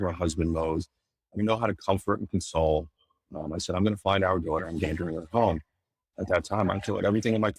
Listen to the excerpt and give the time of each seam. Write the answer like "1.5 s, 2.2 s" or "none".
6.0 s